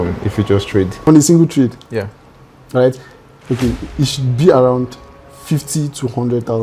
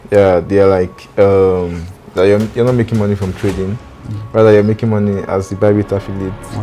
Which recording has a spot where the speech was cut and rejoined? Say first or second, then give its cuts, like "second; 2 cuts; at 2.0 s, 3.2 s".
first; 1 cut; at 1.1 s